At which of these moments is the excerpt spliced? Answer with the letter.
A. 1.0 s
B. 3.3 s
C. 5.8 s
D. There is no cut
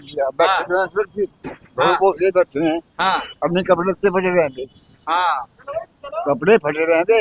D